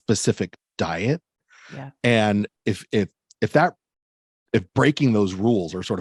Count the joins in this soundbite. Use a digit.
0